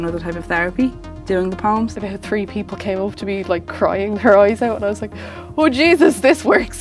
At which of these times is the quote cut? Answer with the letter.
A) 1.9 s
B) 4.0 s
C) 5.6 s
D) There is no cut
A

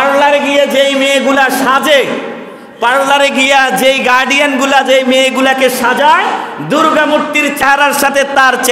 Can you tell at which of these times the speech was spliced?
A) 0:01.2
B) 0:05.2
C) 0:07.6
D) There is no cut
C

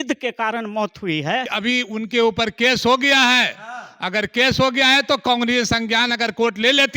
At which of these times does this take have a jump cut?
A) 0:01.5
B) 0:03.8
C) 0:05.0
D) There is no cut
A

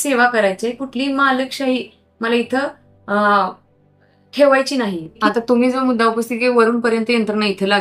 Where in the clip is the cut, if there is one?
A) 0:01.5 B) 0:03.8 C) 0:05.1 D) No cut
C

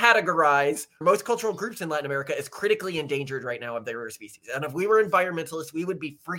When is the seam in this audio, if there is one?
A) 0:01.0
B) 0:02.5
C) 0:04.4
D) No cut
A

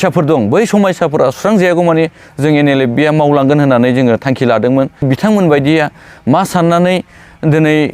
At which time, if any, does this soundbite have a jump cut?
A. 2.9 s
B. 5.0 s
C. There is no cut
B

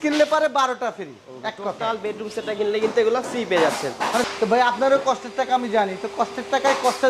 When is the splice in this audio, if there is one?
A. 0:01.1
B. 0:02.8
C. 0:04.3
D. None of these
C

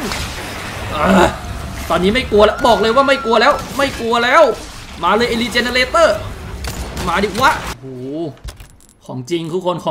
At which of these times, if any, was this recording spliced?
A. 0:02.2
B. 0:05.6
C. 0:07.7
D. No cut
C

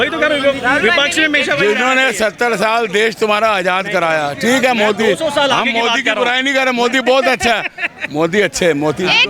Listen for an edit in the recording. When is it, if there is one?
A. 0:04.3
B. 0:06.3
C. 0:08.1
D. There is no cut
D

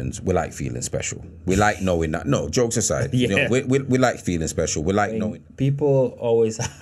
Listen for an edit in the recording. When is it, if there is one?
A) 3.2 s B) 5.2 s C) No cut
B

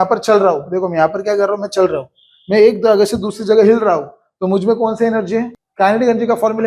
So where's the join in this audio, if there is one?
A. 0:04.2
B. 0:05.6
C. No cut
B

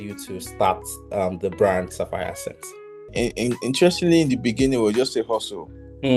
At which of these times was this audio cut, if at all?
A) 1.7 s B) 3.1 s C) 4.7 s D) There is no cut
B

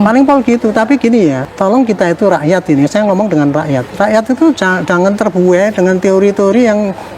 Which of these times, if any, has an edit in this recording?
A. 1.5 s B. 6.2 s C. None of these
A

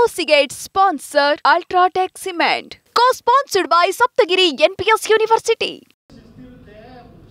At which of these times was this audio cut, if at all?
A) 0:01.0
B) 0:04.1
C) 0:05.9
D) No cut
C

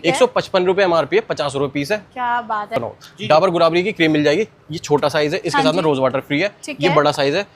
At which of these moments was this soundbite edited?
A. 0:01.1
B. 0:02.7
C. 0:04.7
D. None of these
B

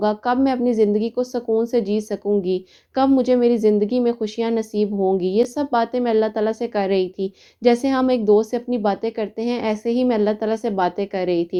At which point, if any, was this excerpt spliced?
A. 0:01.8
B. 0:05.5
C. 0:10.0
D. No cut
D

